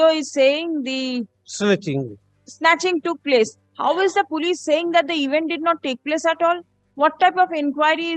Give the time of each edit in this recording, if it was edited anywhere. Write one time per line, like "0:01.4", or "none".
none